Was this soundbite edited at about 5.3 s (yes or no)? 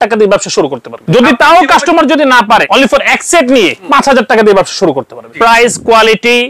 yes